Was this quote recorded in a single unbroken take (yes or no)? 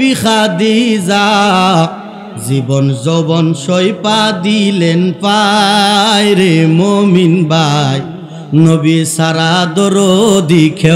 yes